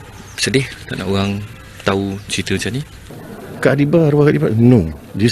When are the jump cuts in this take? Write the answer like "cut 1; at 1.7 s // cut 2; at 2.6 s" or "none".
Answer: cut 1; at 3.0 s